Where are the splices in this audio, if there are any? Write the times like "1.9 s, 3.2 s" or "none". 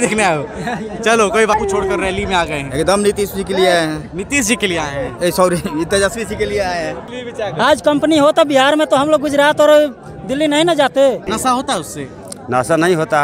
1.5 s, 7.1 s, 11.3 s